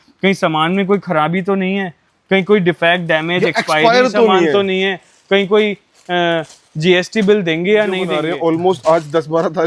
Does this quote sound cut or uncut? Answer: cut